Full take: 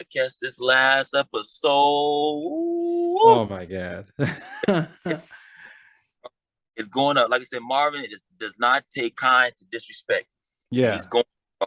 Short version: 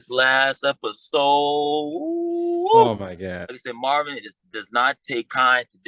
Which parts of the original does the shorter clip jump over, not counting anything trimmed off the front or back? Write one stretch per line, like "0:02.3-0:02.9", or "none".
0:04.1-0:07.5